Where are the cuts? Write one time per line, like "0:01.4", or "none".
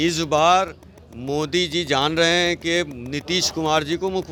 none

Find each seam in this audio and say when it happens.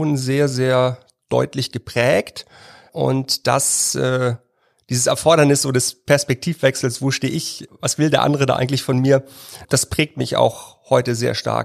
0:02.9
0:07.7
0:09.6

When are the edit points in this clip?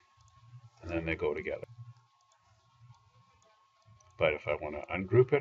0:01.6

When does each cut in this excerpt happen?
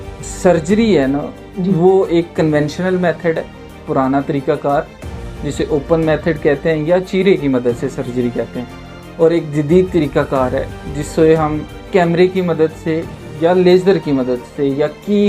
none

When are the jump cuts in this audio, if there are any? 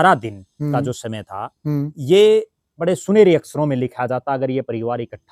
none

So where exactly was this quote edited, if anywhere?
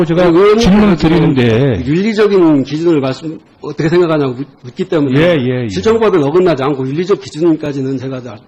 0:02.5

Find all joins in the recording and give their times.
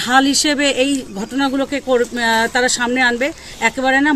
none

